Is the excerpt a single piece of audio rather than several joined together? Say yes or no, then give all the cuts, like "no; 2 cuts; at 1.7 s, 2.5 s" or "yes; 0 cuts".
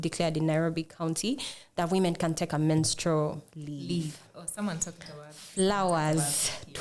yes; 0 cuts